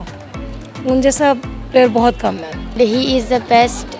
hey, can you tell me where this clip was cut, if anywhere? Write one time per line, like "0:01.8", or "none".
0:02.7